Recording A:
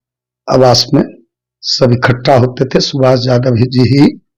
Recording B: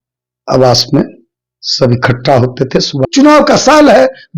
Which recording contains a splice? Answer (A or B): B